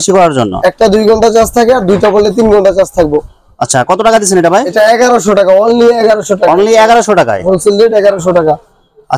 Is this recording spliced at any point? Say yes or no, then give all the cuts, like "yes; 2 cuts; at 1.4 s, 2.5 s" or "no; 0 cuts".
no; 0 cuts